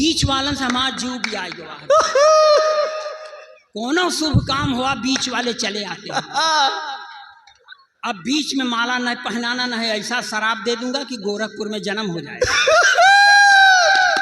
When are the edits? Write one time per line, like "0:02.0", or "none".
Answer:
none